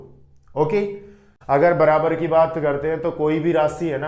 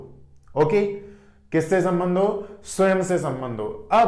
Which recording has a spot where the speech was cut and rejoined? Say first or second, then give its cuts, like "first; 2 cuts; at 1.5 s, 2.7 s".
first; 1 cut; at 1.3 s